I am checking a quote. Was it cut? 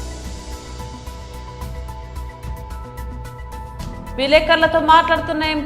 yes; 2 cuts; at 1.3 s, 2.6 s

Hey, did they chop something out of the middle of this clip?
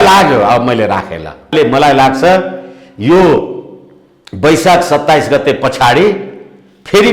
yes; 1 cut; at 1.5 s

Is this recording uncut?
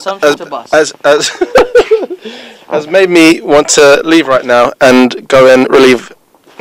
yes; 0 cuts

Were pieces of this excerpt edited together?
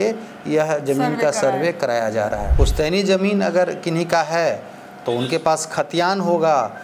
yes; 1 cut; at 2.5 s

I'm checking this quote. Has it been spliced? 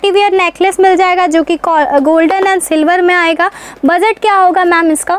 no; 0 cuts

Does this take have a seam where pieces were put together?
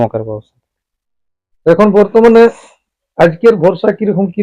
no; 0 cuts

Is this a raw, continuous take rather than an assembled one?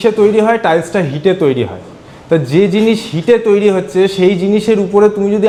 yes; 0 cuts

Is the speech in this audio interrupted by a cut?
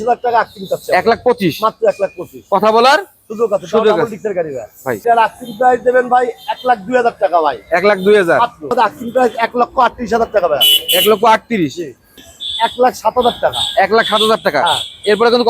yes; 3 cuts; at 5.0 s, 8.7 s, 12.2 s

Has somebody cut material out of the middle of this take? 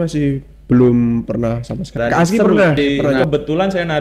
yes; 2 cuts; at 2.0 s, 3.0 s

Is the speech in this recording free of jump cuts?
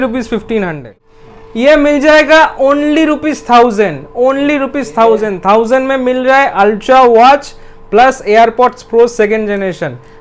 no; 1 cut; at 1.0 s

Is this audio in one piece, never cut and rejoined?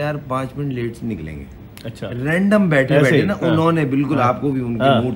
yes; 0 cuts

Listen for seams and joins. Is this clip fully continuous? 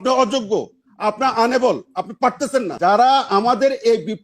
no; 1 cut; at 2.7 s

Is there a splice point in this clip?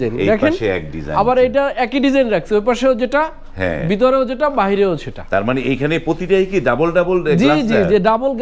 no; 0 cuts

